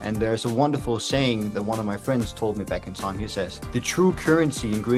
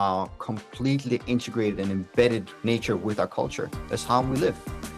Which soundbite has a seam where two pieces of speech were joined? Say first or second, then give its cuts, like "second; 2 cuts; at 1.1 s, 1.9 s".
second; 1 cut; at 2.5 s